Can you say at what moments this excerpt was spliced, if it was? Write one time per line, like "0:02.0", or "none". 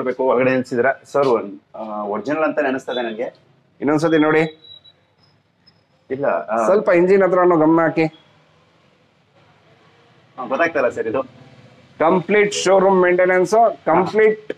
none